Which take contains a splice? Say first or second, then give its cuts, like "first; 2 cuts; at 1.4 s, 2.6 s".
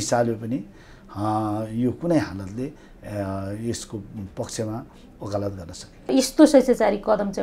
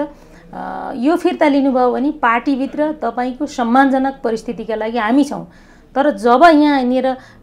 first; 1 cut; at 6.1 s